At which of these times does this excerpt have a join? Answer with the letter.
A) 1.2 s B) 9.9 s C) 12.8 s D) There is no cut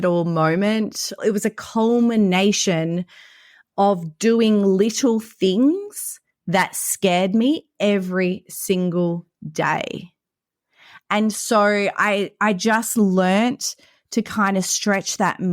A